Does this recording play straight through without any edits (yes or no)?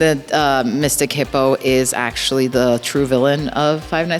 yes